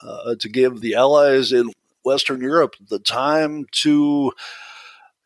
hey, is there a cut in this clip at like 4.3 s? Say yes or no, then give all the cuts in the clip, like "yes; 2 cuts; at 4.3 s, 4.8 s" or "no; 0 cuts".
no; 2 cuts; at 0.8 s, 1.7 s